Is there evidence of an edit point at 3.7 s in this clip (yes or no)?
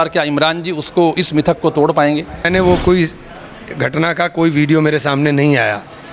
no